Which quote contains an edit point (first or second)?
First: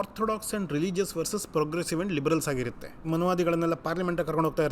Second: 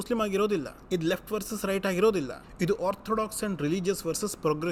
first